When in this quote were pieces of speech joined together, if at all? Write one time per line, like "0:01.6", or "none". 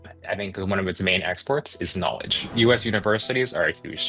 0:02.5